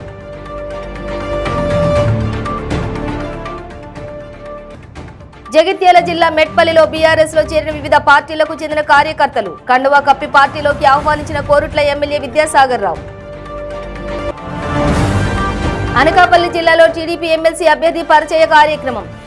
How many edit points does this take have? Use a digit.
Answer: 1